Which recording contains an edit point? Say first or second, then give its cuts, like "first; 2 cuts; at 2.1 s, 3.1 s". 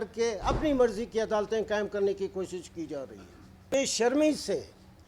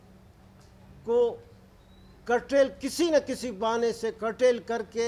first; 1 cut; at 3.6 s